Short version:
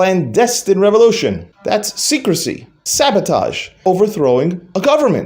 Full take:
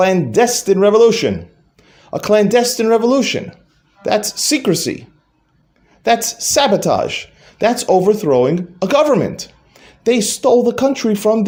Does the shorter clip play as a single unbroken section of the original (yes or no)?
no